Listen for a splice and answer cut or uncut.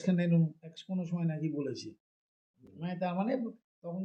uncut